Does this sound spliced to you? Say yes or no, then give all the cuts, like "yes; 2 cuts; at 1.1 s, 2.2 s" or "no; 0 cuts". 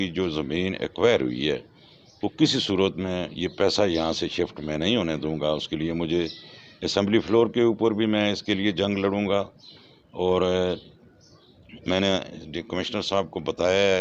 no; 0 cuts